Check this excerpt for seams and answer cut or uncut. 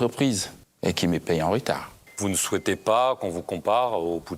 cut